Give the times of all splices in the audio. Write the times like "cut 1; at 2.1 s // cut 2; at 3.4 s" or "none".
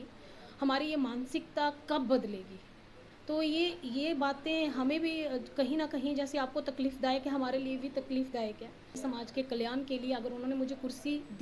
cut 1; at 9.0 s